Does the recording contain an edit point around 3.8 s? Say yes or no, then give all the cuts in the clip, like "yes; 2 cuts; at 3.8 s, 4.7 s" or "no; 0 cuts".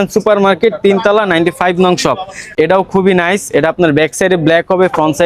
no; 1 cut; at 2.4 s